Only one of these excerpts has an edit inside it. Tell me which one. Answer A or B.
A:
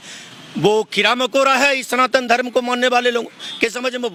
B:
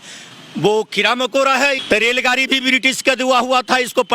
B